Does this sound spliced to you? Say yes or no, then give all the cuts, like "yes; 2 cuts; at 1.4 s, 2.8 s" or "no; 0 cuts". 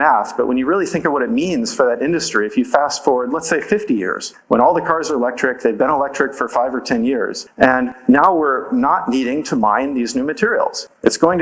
yes; 1 cut; at 7.6 s